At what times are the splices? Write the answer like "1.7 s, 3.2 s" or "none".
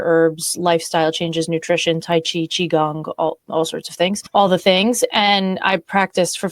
4.2 s